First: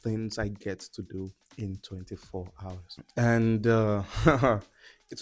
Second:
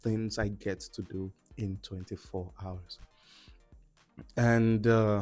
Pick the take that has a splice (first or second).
first